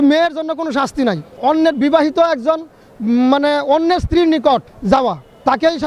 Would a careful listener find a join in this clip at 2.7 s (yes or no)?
no